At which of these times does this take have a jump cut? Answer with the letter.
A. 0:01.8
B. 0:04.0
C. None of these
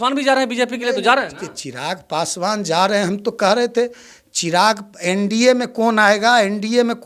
C